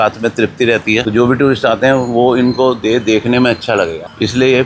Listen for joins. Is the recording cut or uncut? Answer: cut